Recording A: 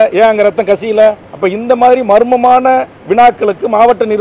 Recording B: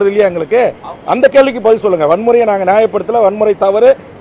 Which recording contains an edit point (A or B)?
A